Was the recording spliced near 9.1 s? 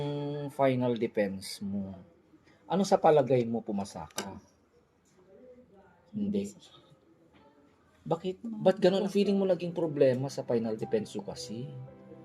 yes; 1 cut; at 9.1 s

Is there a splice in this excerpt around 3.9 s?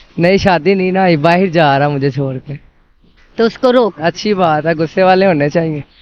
yes; 1 cut; at 3.9 s

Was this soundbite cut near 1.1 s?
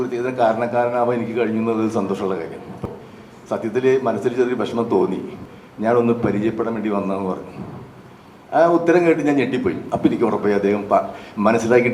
no; 3 cuts; at 2.8 s, 5.4 s, 9.9 s

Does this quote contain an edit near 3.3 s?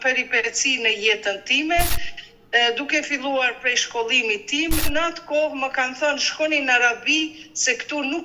no; 1 cut; at 4.9 s

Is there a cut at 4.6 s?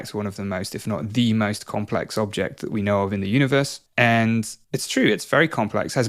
yes; 2 cuts; at 3.8 s, 4.6 s

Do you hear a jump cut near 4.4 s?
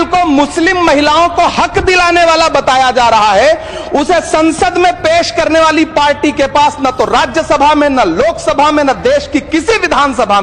no; 0 cuts

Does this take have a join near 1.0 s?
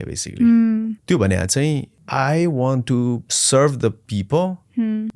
yes; 3 cuts; at 1.0 s, 2.0 s, 3.3 s

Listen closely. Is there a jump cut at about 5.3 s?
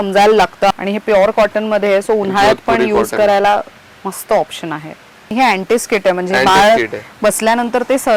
yes; 2 cuts; at 0.7 s, 5.3 s

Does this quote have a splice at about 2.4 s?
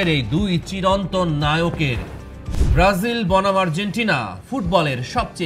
yes; 1 cut; at 2.4 s

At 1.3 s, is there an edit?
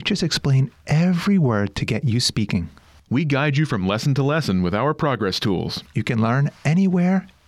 no; 0 cuts

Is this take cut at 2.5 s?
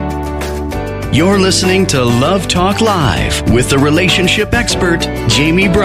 no; 1 cut; at 1.1 s

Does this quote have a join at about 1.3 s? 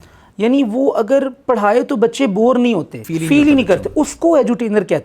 no; 1 cut; at 3.0 s

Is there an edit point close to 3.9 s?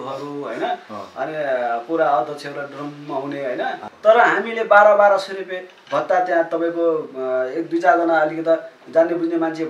yes; 1 cut; at 3.9 s

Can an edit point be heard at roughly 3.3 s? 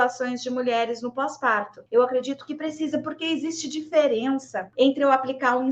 no; 2 cuts; at 1.8 s, 4.7 s

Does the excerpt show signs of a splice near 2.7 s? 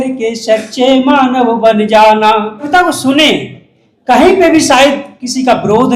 yes; 1 cut; at 2.7 s

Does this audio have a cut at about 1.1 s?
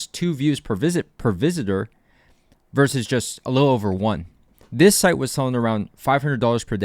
no; 1 cut; at 4.5 s

